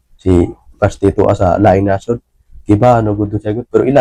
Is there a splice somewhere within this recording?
no; 0 cuts

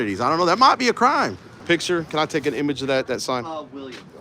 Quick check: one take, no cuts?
no; 1 cut; at 1.6 s

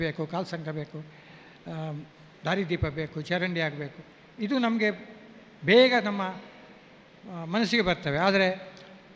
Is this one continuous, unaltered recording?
yes; 0 cuts

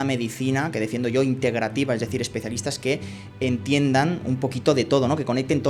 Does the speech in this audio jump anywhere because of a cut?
no; 0 cuts

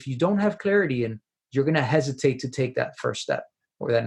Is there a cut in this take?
no; 0 cuts

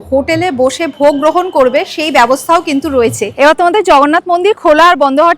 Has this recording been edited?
yes; 1 cut; at 3.2 s

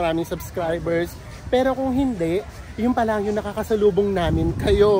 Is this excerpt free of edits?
yes; 0 cuts

